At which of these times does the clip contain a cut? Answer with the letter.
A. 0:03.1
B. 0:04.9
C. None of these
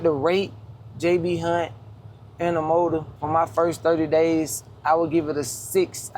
A